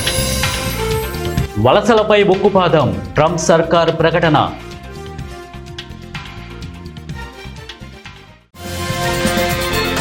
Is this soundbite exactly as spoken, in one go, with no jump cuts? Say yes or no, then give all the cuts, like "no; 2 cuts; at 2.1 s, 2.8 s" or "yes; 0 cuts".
yes; 0 cuts